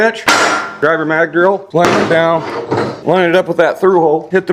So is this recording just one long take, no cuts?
yes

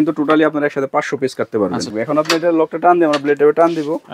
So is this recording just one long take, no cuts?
no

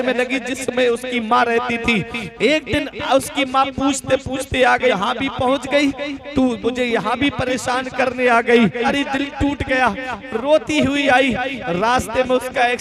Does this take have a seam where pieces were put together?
yes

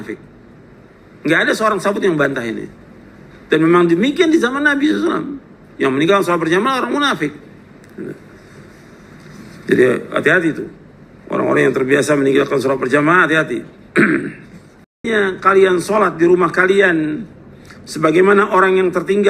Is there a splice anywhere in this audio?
yes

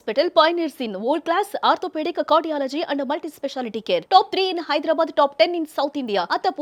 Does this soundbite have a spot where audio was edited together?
no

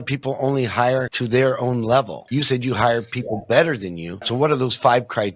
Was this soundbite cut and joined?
yes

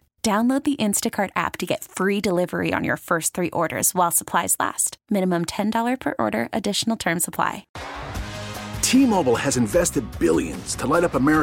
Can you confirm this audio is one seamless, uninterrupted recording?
no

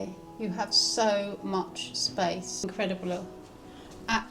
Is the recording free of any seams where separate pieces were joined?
no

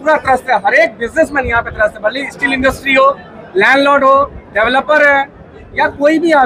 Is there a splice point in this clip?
no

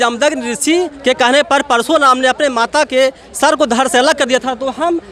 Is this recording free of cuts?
yes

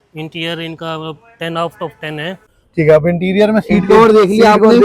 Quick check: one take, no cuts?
no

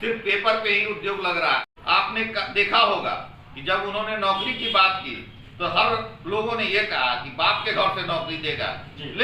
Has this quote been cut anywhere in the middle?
yes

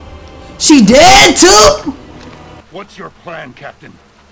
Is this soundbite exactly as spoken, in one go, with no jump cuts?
no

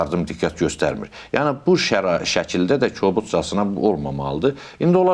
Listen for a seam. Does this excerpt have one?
no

